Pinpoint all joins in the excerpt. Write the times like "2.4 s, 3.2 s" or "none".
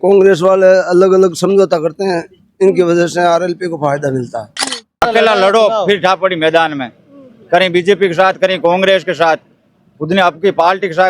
4.9 s